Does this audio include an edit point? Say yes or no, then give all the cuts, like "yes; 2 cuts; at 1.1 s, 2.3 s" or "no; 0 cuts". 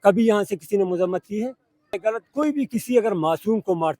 yes; 1 cut; at 2.0 s